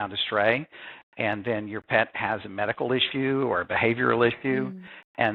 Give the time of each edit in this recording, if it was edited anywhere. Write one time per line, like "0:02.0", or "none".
none